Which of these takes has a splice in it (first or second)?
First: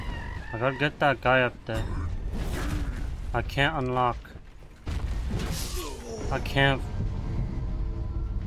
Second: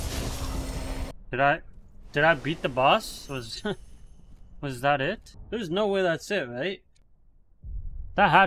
second